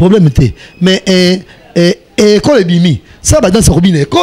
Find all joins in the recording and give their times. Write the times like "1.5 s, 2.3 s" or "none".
none